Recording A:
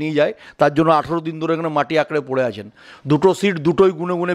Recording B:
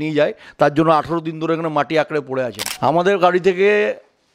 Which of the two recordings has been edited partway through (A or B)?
B